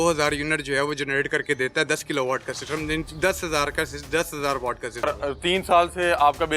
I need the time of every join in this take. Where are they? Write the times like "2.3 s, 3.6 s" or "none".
5.0 s

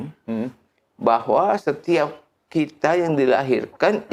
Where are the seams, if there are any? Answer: none

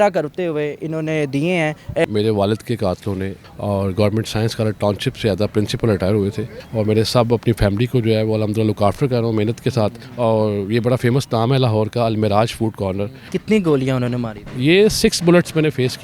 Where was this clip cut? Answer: 2.0 s, 3.4 s, 6.5 s, 10.0 s, 13.3 s

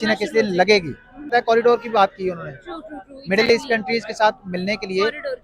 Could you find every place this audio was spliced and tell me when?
1.3 s

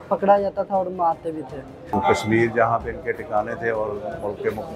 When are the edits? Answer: 1.9 s

